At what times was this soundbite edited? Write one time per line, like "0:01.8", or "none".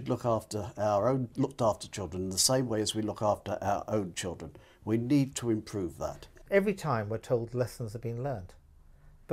0:01.3
0:06.4